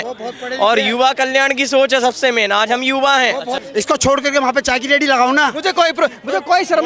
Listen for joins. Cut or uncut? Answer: cut